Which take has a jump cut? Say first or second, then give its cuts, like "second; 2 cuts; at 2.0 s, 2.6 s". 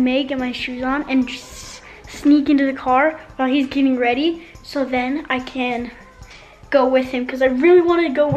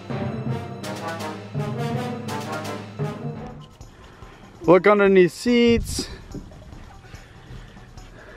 second; 1 cut; at 3.6 s